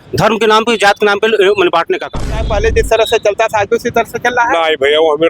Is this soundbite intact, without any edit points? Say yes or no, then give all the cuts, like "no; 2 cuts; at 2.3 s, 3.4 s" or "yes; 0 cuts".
no; 1 cut; at 2.3 s